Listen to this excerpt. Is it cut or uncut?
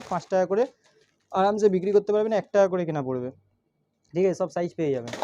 uncut